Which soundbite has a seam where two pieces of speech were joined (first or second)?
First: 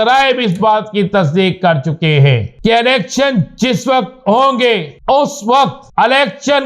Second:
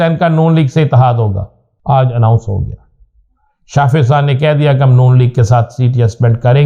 first